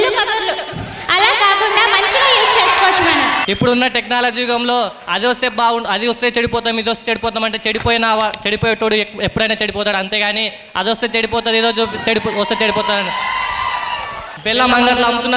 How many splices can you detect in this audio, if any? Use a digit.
2